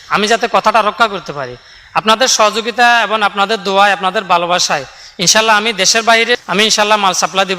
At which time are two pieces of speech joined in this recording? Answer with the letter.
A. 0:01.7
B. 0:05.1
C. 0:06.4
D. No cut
C